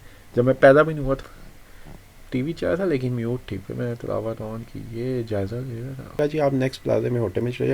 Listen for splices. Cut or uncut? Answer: cut